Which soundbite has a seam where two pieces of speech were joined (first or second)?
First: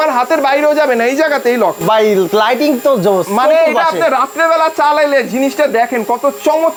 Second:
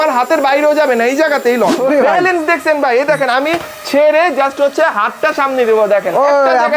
second